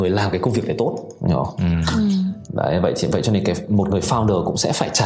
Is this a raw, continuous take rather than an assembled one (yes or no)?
yes